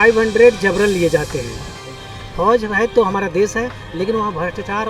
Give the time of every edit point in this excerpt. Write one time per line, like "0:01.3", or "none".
0:02.0